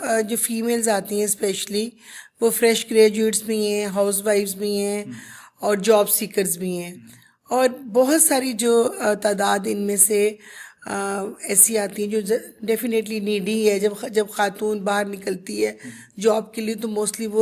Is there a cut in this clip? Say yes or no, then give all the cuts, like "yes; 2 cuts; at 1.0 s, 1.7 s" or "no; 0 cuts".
no; 0 cuts